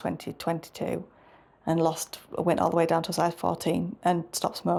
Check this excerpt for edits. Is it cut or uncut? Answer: uncut